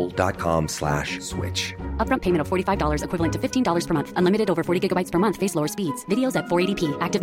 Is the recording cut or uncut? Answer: uncut